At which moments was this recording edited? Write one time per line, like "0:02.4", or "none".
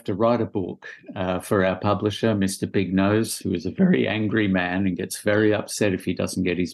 none